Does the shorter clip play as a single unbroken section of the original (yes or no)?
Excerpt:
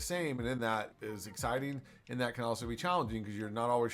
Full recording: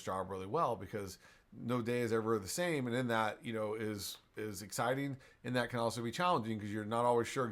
no